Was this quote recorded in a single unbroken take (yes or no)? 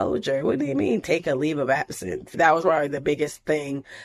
no